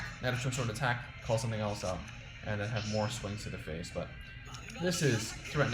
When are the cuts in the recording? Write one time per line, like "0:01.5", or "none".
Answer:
none